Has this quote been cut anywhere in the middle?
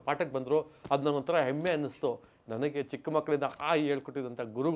no; 0 cuts

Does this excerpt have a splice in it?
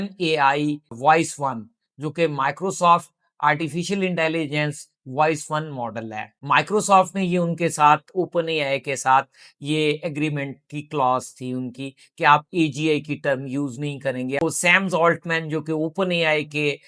yes; 2 cuts; at 6.3 s, 14.4 s

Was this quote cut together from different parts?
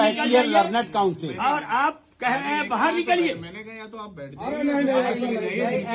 no; 0 cuts

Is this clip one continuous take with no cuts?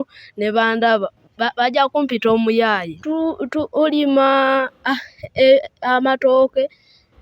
no; 1 cut; at 2.9 s

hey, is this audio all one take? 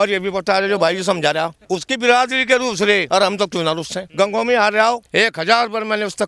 no; 4 cuts; at 1.6 s, 3.1 s, 4.0 s, 5.0 s

